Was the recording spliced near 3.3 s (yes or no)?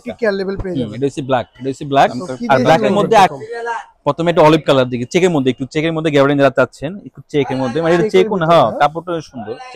yes